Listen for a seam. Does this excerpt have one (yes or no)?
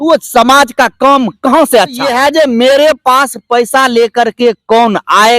yes